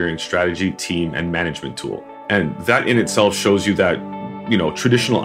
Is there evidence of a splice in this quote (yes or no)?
yes